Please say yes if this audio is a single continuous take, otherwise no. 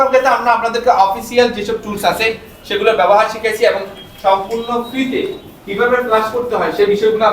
yes